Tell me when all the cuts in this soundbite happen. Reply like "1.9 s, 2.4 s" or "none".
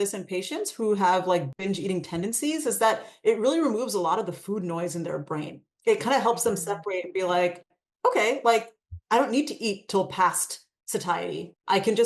1.5 s